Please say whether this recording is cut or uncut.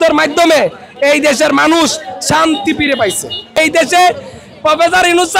cut